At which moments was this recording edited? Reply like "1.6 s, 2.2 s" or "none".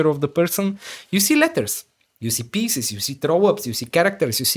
none